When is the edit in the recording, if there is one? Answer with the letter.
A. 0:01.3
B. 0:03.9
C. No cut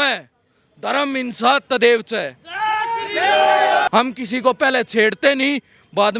B